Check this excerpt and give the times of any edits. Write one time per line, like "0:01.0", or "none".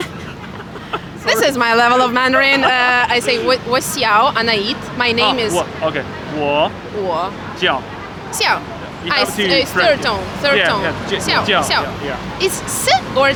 none